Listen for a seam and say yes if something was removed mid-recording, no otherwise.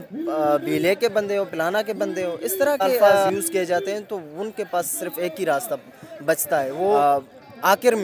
yes